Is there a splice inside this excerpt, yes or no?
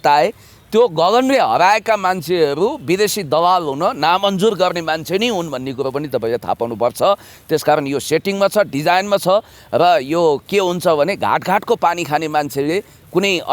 no